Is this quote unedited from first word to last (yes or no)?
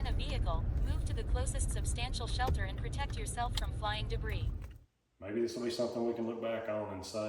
no